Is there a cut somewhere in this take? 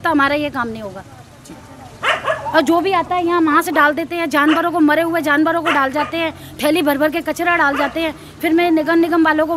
no; 0 cuts

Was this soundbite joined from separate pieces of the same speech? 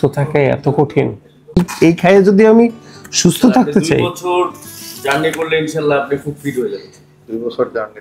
yes; 1 cut; at 1.7 s

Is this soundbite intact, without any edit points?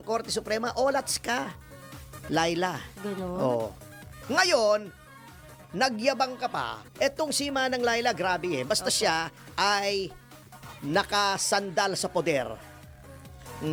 yes; 0 cuts

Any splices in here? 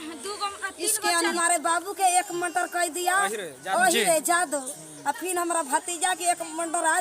yes; 1 cut; at 1.3 s

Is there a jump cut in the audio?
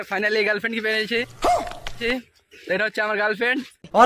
no; 0 cuts

